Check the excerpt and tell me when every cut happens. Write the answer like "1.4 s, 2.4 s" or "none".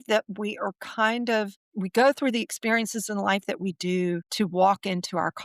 1.6 s, 4.3 s